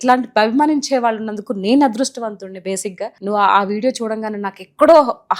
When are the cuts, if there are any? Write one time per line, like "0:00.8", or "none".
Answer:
0:03.1

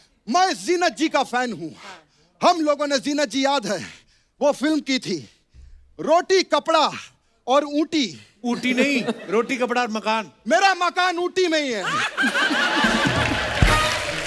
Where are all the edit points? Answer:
none

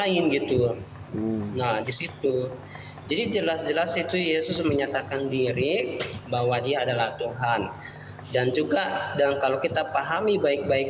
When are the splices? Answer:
none

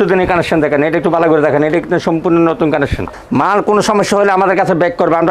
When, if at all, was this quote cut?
0:03.1

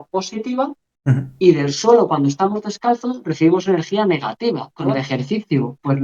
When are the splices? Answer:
0:05.0

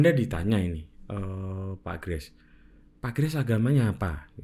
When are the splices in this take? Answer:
none

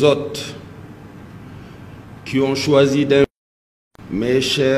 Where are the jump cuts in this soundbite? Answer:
0:03.3

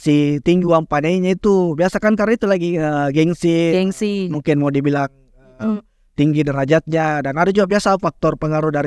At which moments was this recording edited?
none

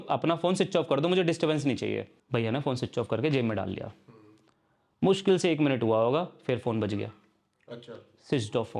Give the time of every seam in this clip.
0:02.2

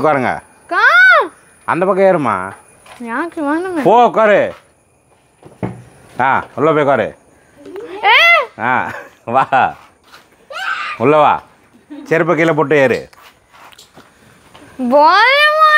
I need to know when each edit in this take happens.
none

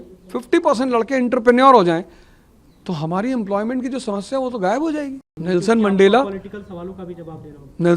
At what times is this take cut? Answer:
0:05.2

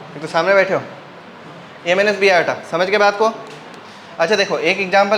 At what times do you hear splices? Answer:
none

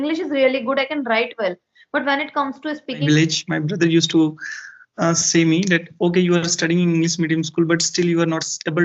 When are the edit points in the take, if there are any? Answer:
0:03.0

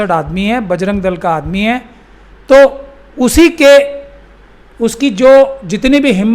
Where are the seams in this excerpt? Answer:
none

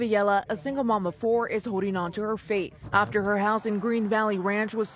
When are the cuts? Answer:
0:02.8

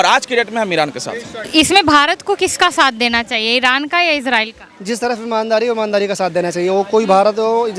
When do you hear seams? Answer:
0:01.4

